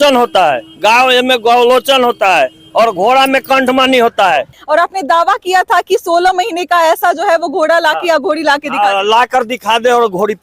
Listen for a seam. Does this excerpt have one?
yes; 1 cut; at 4.5 s

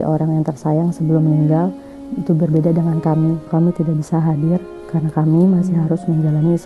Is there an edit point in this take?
yes; 2 cuts; at 3.4 s, 4.7 s

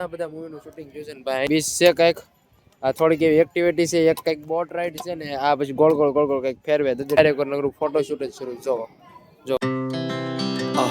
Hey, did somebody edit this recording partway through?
yes; 3 cuts; at 1.5 s, 7.2 s, 9.6 s

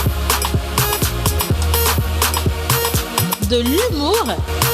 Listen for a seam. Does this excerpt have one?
no; 0 cuts

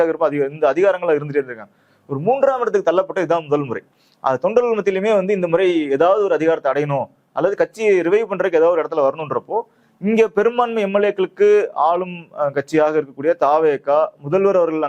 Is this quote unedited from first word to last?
yes; 0 cuts

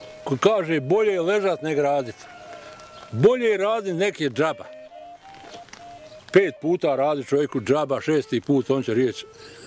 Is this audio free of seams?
yes; 0 cuts

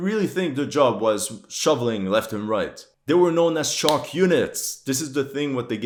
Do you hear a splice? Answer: no; 0 cuts

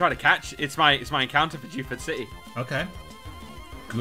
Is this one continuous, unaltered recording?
no; 1 cut; at 2.4 s

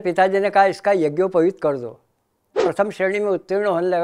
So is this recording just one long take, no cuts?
no; 1 cut; at 2.5 s

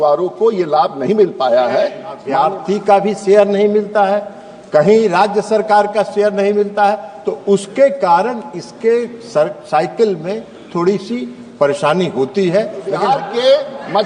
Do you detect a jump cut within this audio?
yes; 2 cuts; at 2.3 s, 13.0 s

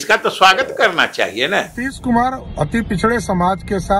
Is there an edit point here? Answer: yes; 1 cut; at 1.9 s

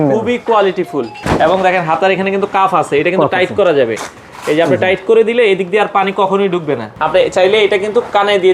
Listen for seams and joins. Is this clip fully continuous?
no; 2 cuts; at 1.2 s, 6.9 s

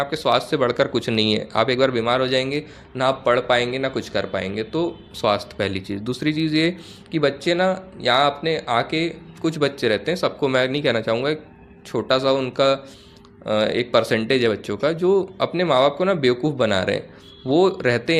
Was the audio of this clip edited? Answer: no; 0 cuts

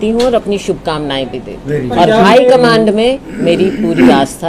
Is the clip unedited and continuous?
no; 1 cut; at 1.9 s

